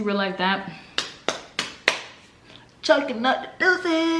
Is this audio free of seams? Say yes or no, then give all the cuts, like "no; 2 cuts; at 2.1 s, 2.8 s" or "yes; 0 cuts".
yes; 0 cuts